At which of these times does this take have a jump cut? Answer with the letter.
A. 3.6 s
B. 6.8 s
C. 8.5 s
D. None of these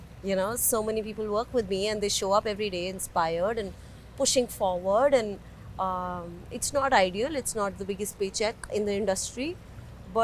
D